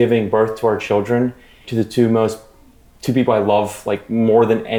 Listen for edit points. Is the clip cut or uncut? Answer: uncut